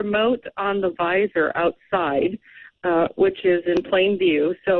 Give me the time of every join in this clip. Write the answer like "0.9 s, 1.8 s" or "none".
none